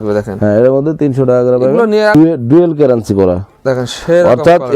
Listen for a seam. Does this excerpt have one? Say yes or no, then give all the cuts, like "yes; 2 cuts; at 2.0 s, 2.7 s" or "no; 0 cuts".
yes; 1 cut; at 2.1 s